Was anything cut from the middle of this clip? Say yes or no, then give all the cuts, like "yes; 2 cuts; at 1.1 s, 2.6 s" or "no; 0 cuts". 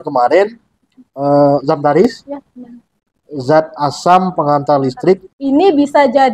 yes; 1 cut; at 5.3 s